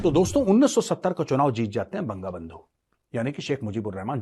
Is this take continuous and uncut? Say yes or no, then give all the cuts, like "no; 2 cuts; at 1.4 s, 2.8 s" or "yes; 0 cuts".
yes; 0 cuts